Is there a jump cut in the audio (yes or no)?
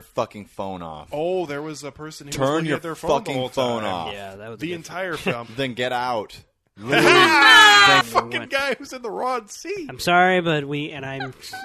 yes